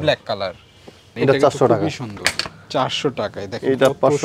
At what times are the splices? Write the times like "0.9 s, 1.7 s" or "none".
1.0 s